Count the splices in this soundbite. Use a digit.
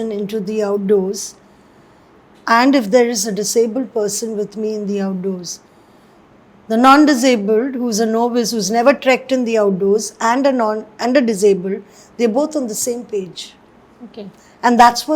0